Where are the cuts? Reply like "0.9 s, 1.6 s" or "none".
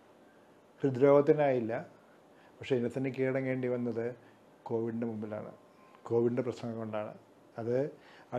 none

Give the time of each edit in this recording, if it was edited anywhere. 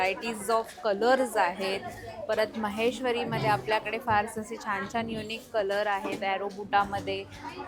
none

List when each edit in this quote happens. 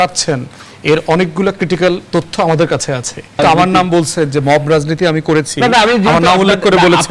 3.4 s

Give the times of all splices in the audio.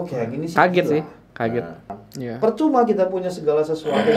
1.9 s

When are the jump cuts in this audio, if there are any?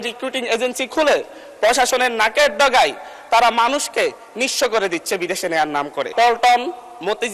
6.1 s

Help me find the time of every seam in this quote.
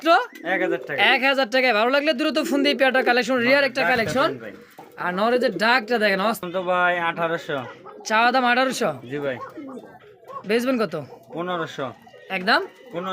6.4 s

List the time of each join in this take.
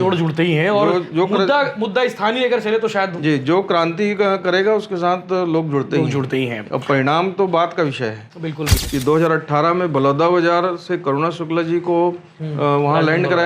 8.7 s

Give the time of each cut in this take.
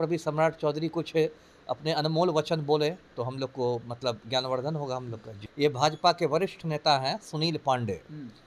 5.4 s

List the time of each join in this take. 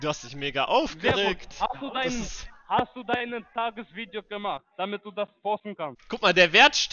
none

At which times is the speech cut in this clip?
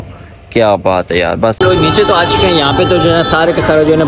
1.6 s

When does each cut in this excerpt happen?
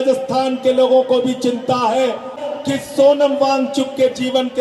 2.4 s

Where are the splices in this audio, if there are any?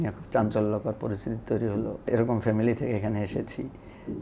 2.1 s

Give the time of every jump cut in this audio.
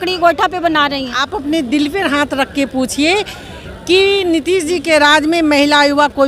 1.2 s

